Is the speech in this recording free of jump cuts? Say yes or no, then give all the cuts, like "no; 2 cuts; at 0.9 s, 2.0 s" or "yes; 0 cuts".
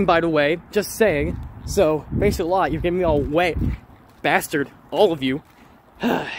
yes; 0 cuts